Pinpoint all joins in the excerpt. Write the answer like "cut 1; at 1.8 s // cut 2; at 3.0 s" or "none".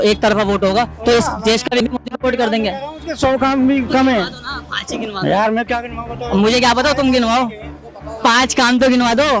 cut 1; at 1.8 s

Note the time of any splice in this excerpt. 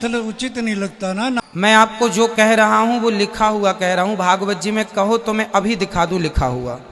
cut 1; at 1.4 s

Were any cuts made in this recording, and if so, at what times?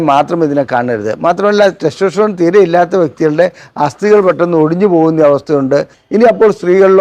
cut 1; at 6.0 s

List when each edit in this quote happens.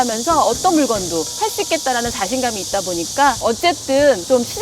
cut 1; at 3.4 s

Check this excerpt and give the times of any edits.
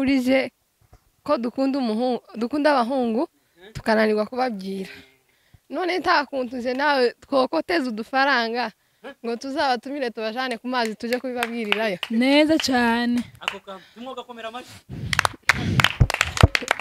none

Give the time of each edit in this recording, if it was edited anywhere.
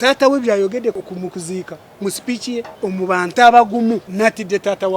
cut 1; at 1.0 s // cut 2; at 2.7 s // cut 3; at 4.1 s

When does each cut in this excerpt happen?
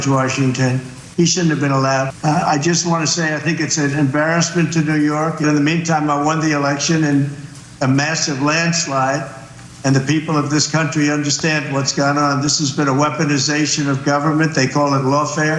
cut 1; at 2.1 s // cut 2; at 5.4 s

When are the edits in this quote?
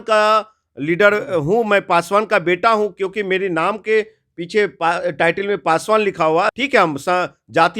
cut 1; at 6.5 s

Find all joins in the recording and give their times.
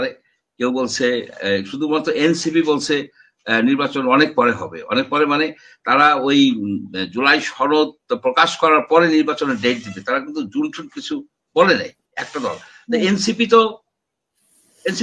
none

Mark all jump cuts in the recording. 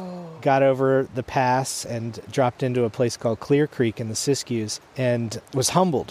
cut 1; at 4.8 s

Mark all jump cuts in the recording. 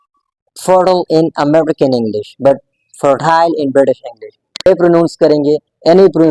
cut 1; at 4.7 s

